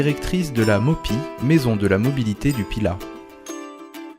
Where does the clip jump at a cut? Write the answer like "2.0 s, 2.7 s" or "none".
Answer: 3.0 s